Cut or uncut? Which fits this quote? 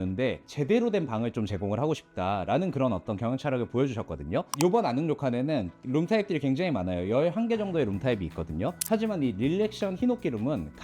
cut